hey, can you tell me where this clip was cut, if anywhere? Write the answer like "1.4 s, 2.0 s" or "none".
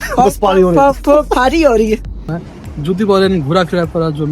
2.4 s

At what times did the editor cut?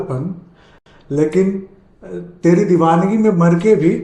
none

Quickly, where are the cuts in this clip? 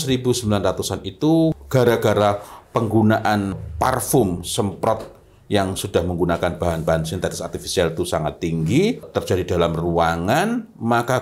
1.6 s, 3.6 s, 9.1 s

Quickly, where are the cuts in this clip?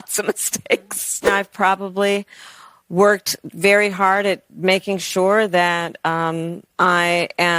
1.3 s

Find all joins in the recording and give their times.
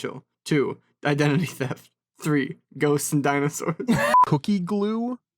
4.2 s

